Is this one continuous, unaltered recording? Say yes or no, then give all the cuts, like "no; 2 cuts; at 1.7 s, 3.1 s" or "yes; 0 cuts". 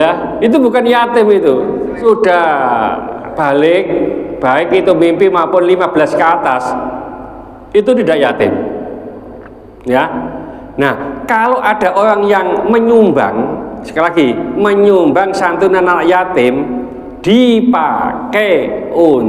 no; 1 cut; at 2.0 s